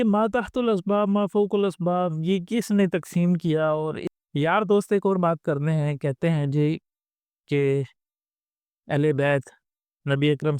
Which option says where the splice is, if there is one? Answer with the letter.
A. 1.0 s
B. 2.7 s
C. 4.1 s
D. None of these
C